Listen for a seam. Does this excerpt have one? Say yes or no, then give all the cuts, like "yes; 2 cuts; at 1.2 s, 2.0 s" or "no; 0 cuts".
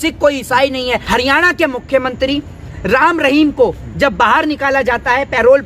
yes; 1 cut; at 1.0 s